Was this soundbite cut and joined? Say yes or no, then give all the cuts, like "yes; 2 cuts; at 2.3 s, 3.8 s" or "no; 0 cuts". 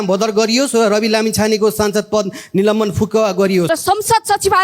yes; 1 cut; at 3.7 s